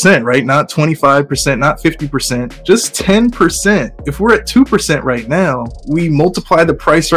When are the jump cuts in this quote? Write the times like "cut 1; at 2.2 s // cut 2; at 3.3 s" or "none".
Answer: cut 1; at 2.5 s // cut 2; at 4.0 s // cut 3; at 5.7 s